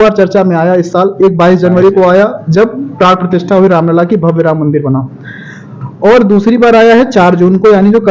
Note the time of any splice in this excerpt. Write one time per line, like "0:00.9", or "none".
none